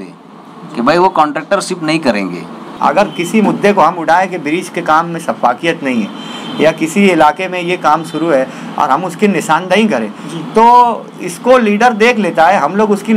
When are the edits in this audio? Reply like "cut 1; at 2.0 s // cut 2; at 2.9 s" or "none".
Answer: cut 1; at 2.7 s